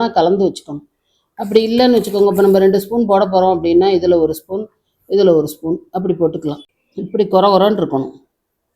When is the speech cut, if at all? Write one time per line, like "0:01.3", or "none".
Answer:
0:06.7